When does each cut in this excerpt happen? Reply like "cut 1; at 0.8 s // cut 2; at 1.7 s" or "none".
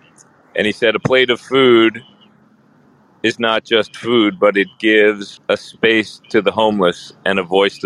cut 1; at 5.3 s